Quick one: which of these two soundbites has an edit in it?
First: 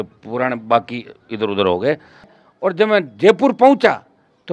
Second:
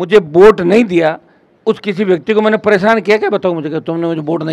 first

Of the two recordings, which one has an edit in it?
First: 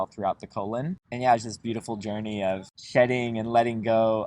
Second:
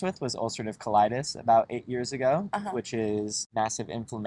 first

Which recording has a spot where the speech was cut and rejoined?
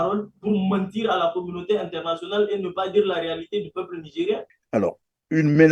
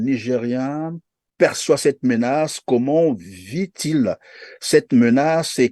first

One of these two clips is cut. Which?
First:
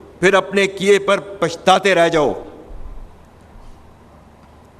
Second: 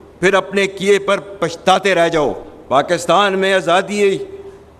second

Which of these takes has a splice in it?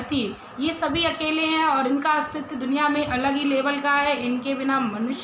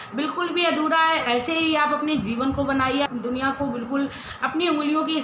second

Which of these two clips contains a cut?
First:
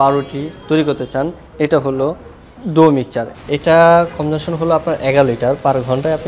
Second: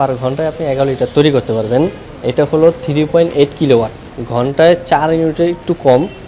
first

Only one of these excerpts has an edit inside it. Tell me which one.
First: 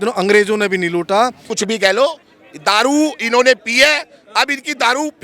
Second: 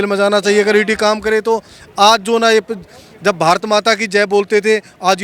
first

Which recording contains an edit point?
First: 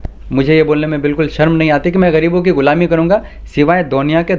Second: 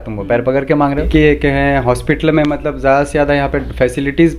second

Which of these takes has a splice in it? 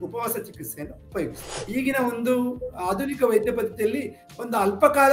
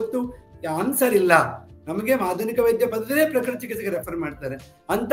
first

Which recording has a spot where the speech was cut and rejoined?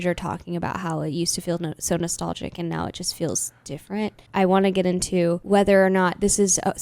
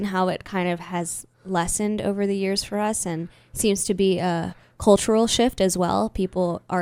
first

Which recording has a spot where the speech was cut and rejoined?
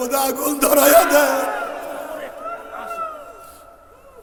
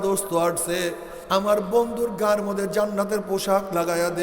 second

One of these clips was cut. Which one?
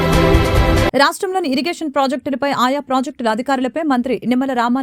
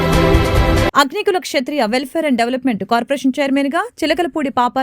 first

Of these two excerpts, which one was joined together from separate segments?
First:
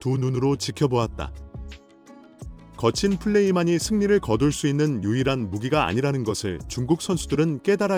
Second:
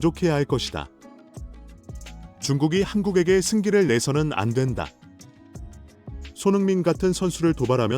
second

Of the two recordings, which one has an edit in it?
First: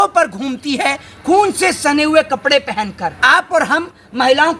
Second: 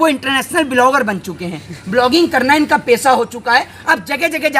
first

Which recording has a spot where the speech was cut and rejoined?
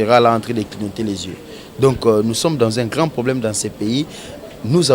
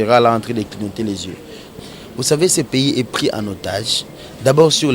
second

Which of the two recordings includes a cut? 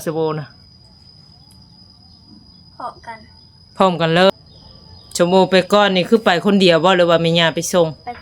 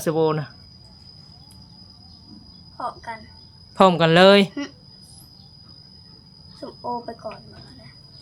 first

